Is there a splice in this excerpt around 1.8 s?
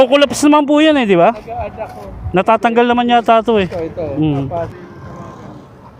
no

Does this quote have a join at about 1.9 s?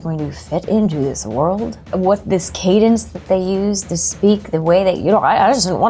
yes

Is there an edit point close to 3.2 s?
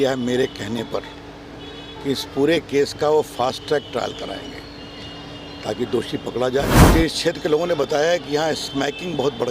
no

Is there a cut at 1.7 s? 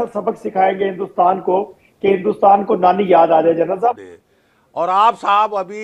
no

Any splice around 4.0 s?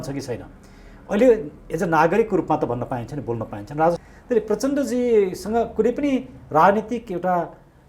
yes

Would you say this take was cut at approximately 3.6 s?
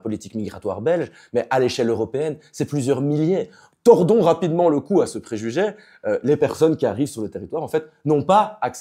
yes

